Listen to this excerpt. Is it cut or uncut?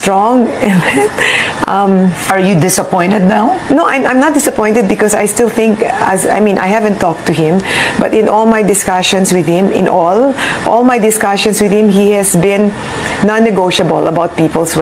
uncut